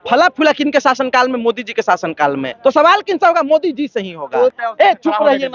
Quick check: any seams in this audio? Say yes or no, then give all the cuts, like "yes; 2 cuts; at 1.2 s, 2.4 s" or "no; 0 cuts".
yes; 2 cuts; at 2.5 s, 4.6 s